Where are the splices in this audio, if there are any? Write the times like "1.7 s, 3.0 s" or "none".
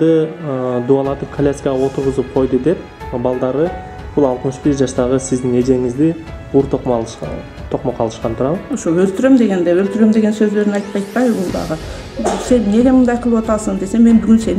none